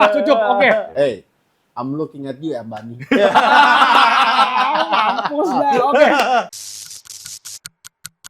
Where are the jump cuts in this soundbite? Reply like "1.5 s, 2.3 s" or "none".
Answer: 0.9 s, 6.5 s